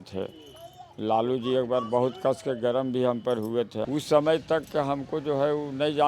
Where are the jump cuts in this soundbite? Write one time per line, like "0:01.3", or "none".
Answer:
0:03.9